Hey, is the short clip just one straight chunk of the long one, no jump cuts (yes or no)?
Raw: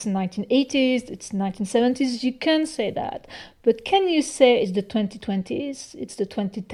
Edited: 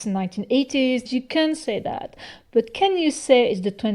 no